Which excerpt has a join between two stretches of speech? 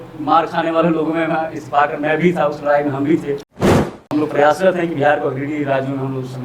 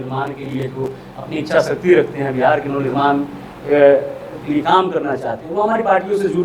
first; 1 cut; at 3.6 s

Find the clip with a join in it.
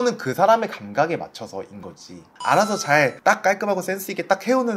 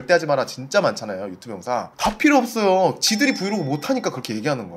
first; 1 cut; at 2.3 s

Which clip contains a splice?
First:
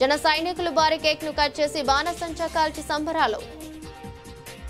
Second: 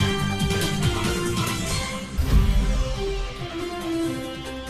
first; 1 cut; at 3.7 s

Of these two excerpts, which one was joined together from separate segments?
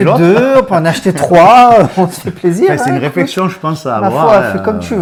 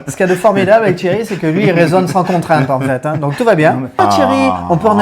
second; 1 cut; at 4.0 s

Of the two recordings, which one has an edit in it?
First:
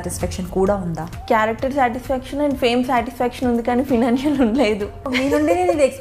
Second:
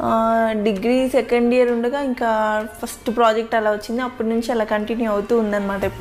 first; 2 cuts; at 1.1 s, 5.1 s

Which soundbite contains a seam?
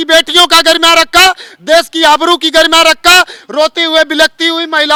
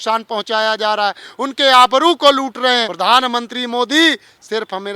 second; 1 cut; at 2.9 s

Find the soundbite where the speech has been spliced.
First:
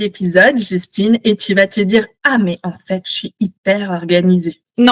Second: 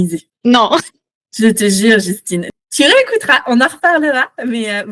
second; 1 cut; at 2.6 s

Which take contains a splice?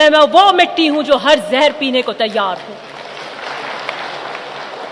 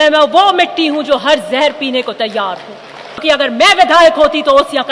second; 1 cut; at 3.2 s

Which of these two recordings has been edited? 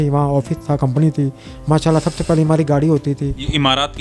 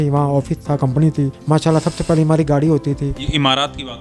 second; 1 cut; at 1.4 s

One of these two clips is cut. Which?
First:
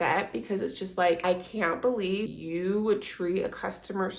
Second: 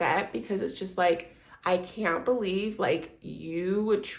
first; 2 cuts; at 1.2 s, 2.3 s

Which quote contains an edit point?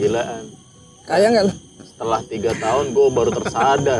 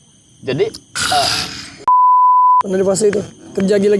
second; 2 cuts; at 1.7 s, 2.6 s

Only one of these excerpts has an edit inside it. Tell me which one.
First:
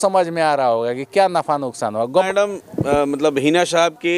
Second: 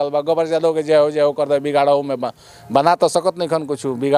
first; 1 cut; at 2.3 s

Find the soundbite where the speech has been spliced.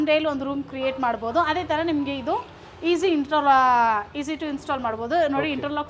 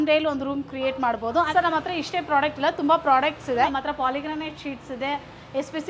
second; 2 cuts; at 1.5 s, 3.7 s

